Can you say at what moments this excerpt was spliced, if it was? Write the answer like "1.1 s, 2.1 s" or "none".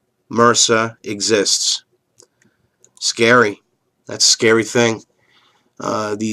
0.9 s